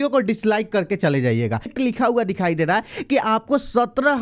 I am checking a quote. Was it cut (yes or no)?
yes